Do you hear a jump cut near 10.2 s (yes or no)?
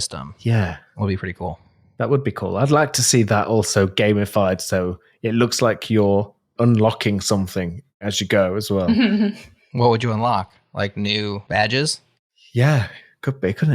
no